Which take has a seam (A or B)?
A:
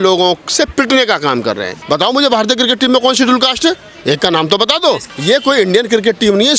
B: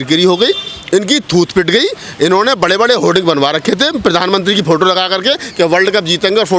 A